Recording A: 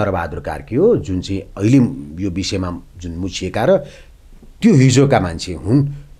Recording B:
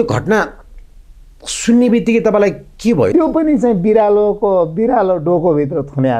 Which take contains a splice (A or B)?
B